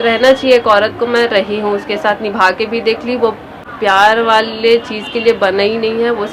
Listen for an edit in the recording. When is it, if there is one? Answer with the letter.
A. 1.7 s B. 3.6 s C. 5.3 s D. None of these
D